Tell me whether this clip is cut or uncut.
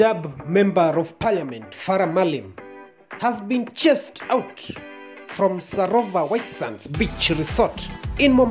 uncut